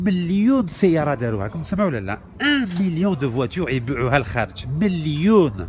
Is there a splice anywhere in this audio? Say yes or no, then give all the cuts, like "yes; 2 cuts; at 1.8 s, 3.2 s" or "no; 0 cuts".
no; 0 cuts